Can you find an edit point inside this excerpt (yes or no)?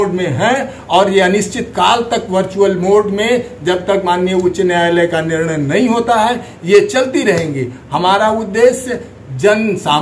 no